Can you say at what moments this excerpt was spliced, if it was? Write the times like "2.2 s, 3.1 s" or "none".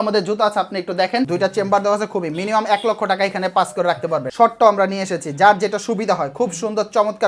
1.3 s, 4.3 s